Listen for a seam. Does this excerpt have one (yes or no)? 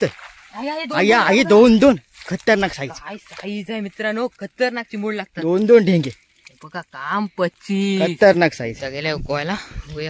yes